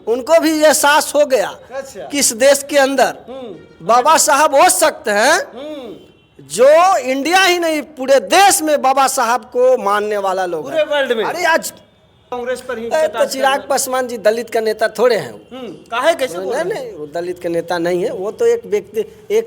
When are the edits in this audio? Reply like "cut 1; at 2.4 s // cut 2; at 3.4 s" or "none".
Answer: cut 1; at 12.2 s